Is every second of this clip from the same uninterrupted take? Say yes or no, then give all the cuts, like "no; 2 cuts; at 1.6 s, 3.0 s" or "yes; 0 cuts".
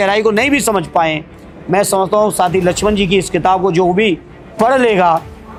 yes; 0 cuts